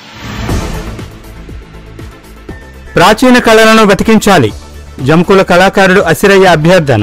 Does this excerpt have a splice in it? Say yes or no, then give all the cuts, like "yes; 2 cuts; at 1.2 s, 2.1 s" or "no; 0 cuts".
yes; 1 cut; at 2.7 s